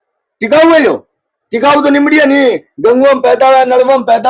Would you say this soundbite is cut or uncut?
uncut